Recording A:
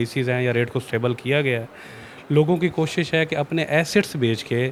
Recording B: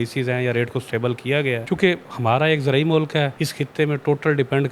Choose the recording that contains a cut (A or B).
B